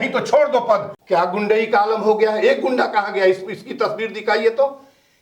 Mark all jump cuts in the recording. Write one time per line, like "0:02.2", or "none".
0:00.9